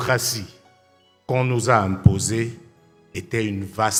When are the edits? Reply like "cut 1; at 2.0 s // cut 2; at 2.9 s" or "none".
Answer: none